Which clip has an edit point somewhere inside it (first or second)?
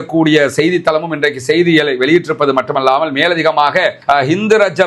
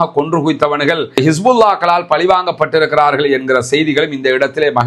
first